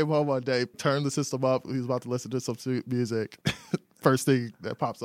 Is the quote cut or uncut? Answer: cut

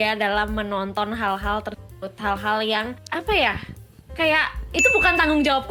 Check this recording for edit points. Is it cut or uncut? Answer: cut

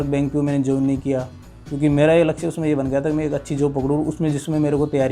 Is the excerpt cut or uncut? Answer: uncut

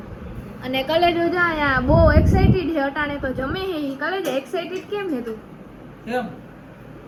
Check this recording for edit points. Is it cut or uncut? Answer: uncut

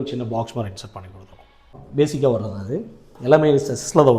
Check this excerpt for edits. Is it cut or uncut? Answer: cut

